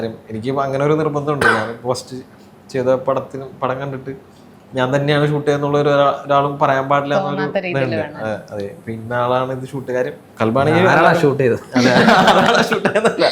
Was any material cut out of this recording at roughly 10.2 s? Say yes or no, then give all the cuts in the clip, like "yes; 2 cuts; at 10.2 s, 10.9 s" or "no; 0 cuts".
yes; 1 cut; at 10.2 s